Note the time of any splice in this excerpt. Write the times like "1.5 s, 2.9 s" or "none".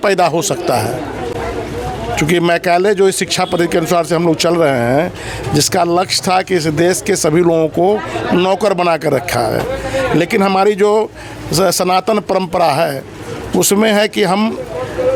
none